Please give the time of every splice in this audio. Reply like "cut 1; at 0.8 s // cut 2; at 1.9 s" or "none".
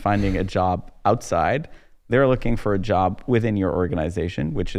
none